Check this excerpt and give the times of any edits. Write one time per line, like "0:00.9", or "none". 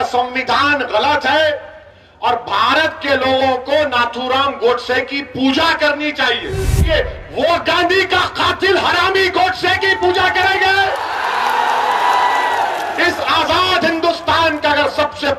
0:06.9